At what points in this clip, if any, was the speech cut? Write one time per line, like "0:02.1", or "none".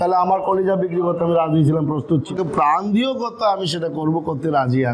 0:02.3